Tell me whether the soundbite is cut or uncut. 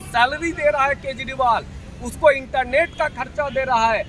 uncut